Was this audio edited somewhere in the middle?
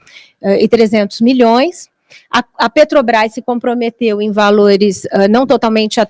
no; 0 cuts

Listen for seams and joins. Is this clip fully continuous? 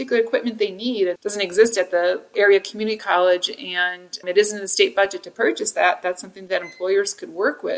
no; 2 cuts; at 1.2 s, 2.3 s

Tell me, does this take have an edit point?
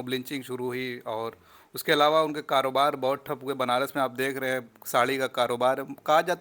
no; 0 cuts

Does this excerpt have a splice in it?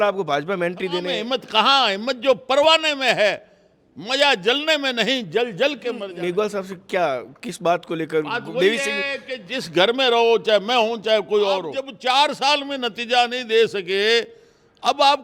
yes; 3 cuts; at 1.1 s, 6.1 s, 11.8 s

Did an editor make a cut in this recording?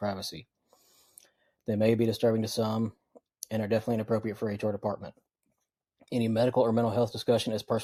no; 0 cuts

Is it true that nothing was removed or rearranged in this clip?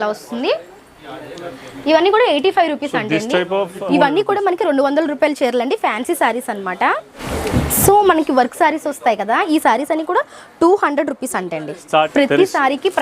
no; 3 cuts; at 3.8 s, 7.2 s, 12.1 s

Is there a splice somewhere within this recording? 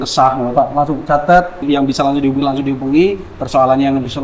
yes; 1 cut; at 1.6 s

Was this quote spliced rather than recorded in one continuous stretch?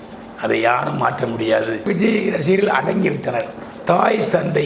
yes; 2 cuts; at 1.9 s, 3.7 s

